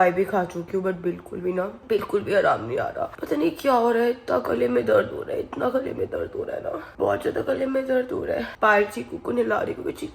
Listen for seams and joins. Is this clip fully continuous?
yes; 0 cuts

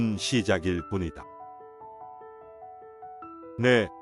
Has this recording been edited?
no; 0 cuts

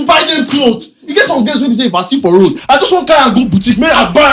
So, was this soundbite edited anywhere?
no; 0 cuts

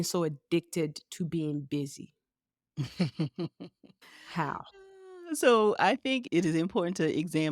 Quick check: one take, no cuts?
no; 1 cut; at 6.2 s

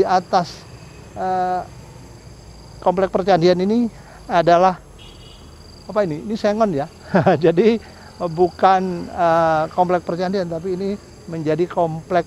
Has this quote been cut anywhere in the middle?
no; 0 cuts

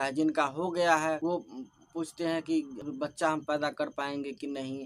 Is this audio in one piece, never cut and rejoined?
no; 2 cuts; at 1.2 s, 2.8 s

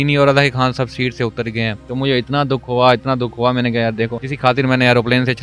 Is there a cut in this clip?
yes; 2 cuts; at 1.8 s, 4.2 s

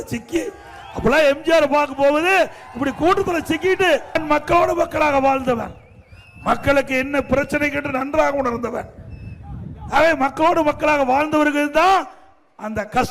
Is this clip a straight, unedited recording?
no; 1 cut; at 4.2 s

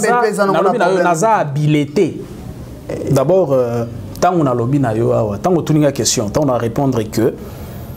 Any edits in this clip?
yes; 1 cut; at 3.0 s

